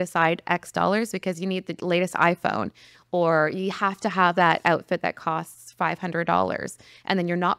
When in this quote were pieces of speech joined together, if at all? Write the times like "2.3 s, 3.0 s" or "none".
none